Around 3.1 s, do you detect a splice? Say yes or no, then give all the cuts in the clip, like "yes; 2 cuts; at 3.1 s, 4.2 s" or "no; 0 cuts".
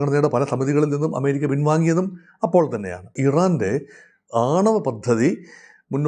yes; 1 cut; at 3.1 s